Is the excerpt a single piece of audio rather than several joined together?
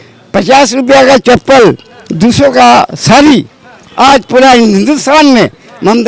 yes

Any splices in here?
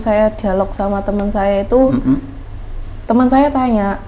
no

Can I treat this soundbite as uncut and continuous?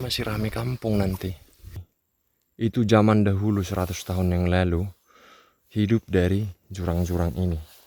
no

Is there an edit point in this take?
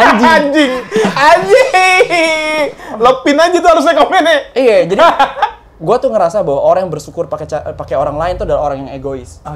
no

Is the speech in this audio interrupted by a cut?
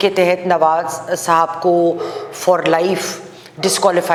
no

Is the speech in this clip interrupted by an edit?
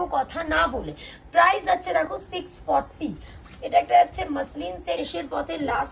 yes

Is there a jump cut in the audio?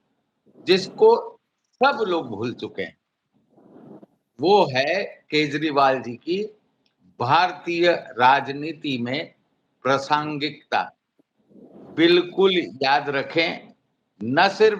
no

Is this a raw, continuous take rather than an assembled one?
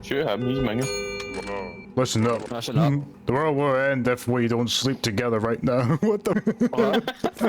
no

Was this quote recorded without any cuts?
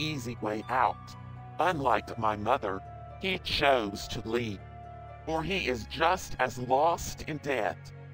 yes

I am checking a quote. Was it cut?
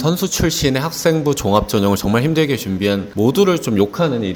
no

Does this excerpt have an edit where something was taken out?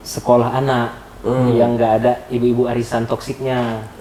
no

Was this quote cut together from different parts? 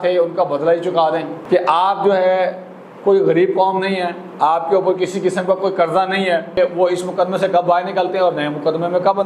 yes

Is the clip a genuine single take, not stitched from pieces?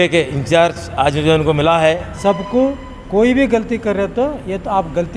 no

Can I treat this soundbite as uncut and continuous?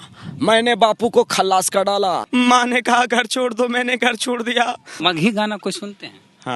no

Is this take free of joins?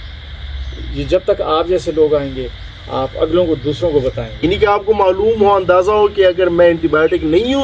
no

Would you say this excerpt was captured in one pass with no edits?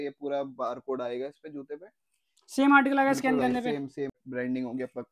no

